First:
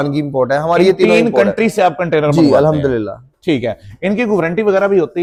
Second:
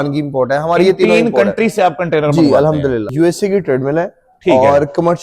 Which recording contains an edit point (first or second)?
second